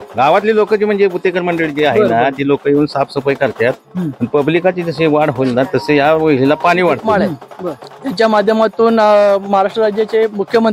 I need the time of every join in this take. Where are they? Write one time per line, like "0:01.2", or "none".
0:07.0